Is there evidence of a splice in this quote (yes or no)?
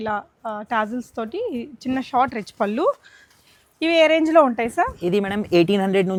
no